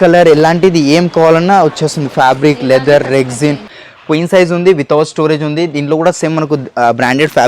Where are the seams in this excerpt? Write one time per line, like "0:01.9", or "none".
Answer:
0:03.7